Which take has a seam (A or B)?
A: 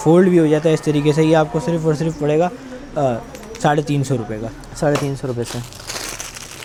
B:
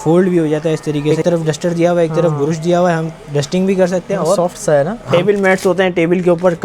B